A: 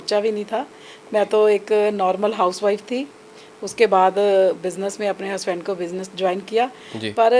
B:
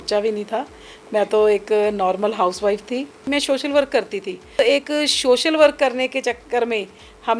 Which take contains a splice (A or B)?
B